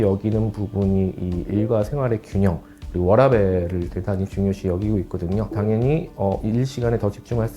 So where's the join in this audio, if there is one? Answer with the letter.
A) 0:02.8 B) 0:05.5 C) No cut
B